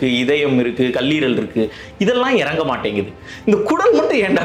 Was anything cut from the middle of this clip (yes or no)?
no